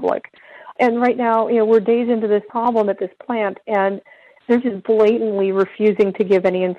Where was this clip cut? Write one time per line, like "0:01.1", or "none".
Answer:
0:02.5